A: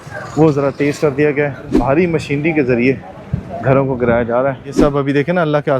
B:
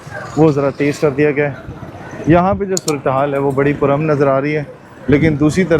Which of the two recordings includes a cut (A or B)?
A